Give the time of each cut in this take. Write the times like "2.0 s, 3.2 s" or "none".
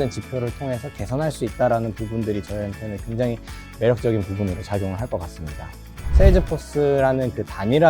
6.0 s